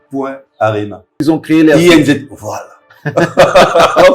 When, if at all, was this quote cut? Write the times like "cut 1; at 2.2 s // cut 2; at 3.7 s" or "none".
cut 1; at 1.1 s